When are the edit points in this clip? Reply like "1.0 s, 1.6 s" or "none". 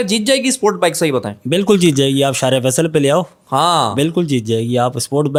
none